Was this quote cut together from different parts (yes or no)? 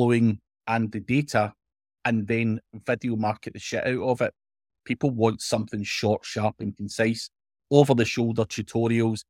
yes